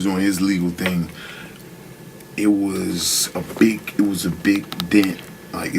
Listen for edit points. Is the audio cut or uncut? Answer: uncut